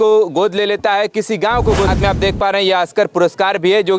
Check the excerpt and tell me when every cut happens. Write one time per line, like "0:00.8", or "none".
0:01.9